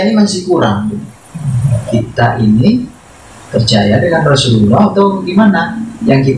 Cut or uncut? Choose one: cut